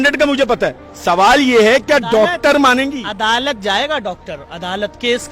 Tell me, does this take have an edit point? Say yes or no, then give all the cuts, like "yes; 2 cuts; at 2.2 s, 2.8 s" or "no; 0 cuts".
no; 0 cuts